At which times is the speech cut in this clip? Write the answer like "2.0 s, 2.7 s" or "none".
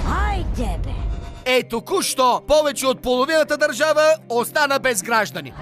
none